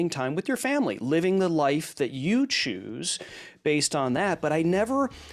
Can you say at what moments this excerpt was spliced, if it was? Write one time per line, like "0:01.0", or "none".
none